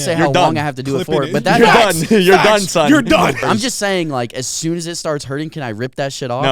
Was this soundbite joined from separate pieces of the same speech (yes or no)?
yes